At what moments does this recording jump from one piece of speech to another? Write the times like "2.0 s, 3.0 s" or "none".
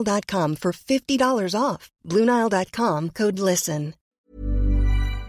4.0 s